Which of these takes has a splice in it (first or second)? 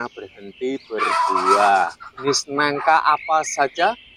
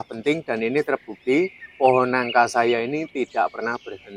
first